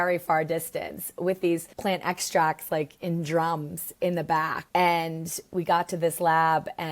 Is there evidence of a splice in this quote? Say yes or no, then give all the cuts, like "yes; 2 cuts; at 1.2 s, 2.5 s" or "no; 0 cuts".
yes; 2 cuts; at 1.7 s, 4.6 s